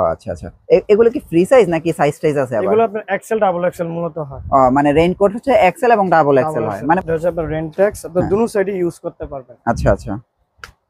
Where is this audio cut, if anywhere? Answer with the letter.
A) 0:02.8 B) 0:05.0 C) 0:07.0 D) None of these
C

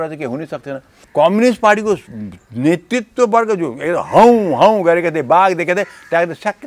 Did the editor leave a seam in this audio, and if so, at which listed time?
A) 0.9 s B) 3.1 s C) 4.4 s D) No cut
A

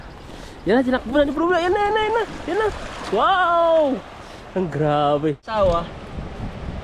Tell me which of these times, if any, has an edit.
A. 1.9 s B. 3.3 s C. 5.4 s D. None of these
C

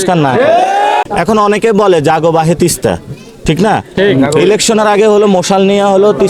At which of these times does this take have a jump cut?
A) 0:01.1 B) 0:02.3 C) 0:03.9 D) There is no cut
A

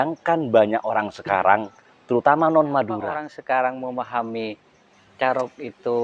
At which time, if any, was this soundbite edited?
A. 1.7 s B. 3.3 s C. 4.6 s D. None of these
B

